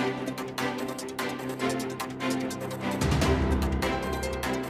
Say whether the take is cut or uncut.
uncut